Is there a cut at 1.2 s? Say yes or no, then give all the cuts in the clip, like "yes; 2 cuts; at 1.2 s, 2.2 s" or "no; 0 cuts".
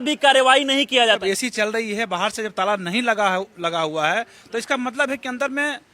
yes; 1 cut; at 1.2 s